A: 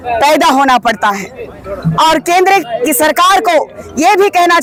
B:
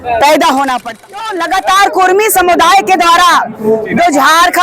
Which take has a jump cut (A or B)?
B